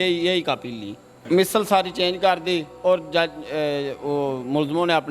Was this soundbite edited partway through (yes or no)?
yes